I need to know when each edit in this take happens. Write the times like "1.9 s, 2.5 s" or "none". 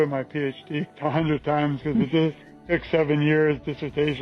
0.9 s

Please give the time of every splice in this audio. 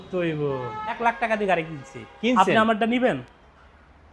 1.0 s

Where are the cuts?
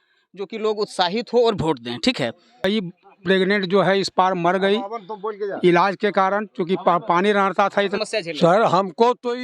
2.6 s, 7.9 s

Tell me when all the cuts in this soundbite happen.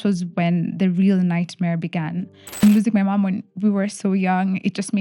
2.6 s

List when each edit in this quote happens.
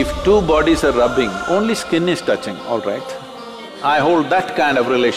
3.7 s

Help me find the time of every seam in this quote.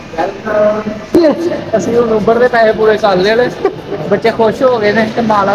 1.2 s

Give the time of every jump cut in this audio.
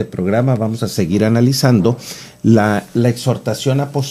none

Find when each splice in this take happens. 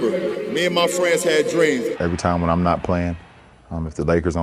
1.9 s

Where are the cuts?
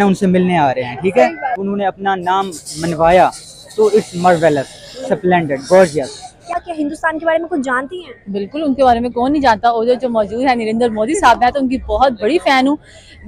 1.7 s, 6.5 s

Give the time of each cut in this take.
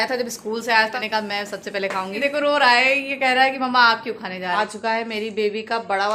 0.9 s, 2.2 s, 4.6 s

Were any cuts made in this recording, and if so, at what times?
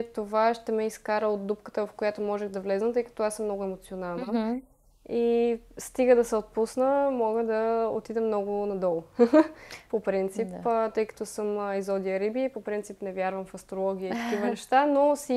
none

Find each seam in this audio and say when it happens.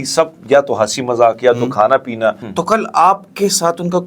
2.5 s

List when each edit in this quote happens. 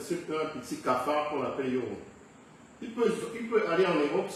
none

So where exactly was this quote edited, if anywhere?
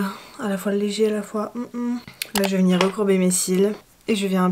none

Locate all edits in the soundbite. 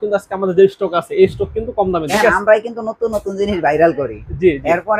2.1 s

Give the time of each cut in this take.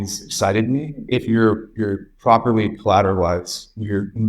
1.1 s

